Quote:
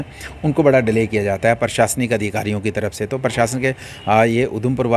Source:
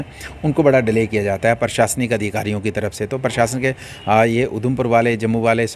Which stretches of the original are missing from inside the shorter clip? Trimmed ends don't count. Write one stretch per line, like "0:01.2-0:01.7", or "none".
none

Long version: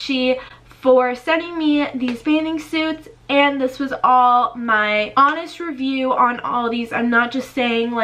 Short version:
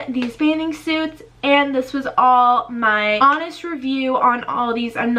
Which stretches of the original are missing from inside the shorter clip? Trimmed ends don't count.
0:05.0-0:05.1

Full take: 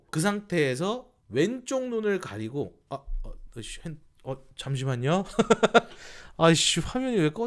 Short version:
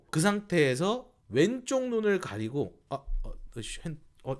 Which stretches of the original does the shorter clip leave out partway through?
none

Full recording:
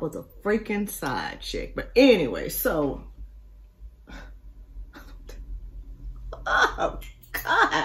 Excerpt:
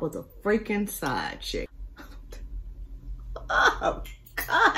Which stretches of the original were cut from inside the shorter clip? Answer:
0:01.7-0:04.7

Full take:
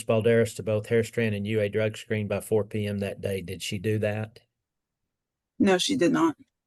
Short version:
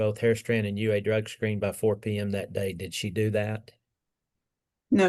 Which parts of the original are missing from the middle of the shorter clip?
none

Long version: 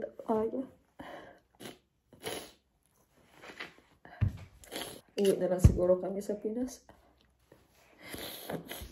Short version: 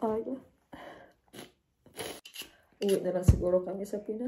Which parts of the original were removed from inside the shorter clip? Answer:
0:02.9-0:05.0

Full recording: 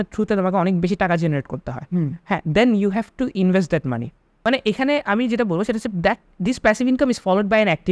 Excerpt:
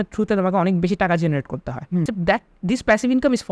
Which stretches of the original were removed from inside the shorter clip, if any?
0:02.1-0:05.9

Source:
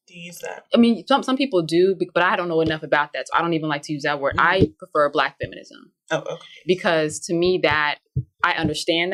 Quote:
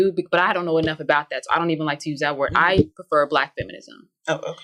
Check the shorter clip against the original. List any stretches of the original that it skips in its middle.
none

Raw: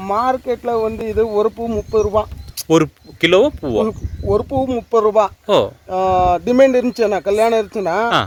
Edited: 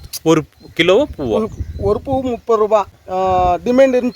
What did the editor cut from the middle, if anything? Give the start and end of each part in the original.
0:05.4-0:05.8

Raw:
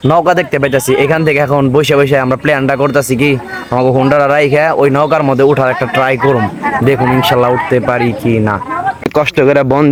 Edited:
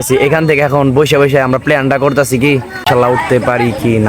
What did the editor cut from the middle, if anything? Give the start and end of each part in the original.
0:03.6-0:07.3

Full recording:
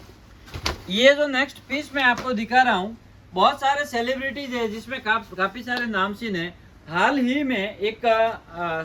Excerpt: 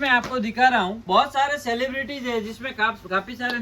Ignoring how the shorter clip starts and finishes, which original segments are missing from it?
0:02.9-0:03.3

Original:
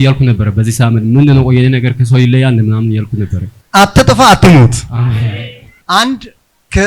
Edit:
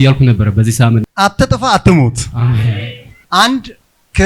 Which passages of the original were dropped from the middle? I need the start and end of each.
0:01.0-0:03.6

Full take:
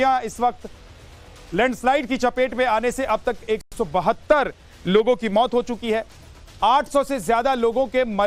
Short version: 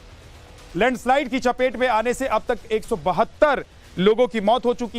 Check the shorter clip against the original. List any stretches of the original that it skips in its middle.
0:03.7-0:03.8

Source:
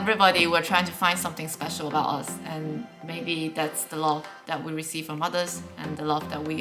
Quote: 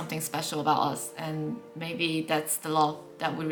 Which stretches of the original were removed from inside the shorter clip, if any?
none

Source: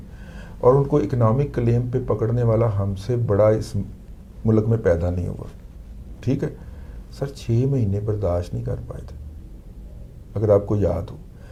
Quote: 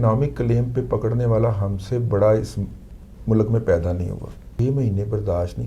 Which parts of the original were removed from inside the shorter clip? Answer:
0:05.8-0:07.5

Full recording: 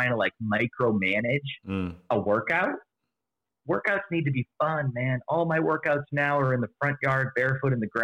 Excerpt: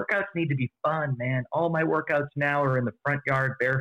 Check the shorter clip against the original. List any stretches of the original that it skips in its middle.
none

